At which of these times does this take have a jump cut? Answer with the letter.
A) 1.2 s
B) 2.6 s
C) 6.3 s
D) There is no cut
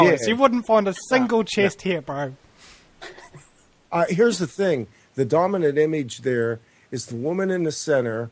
D